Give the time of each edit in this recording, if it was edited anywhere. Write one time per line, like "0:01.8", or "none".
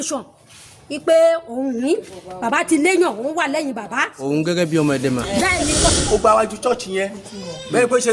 0:06.0